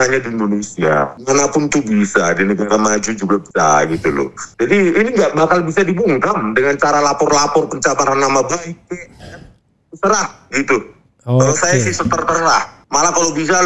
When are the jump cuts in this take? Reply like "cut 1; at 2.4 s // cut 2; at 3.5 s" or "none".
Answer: cut 1; at 1.2 s // cut 2; at 3.5 s // cut 3; at 4.4 s // cut 4; at 12.8 s